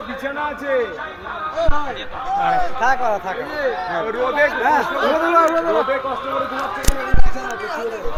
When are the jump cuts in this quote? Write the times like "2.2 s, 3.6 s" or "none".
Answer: none